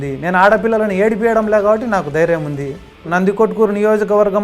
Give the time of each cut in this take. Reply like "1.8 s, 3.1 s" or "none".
3.1 s